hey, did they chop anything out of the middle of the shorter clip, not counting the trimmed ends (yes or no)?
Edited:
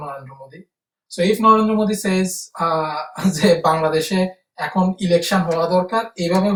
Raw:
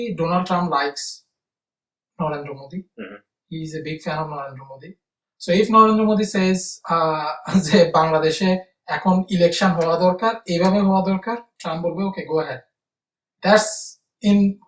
no